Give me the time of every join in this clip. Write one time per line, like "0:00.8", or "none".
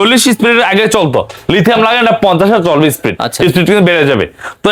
none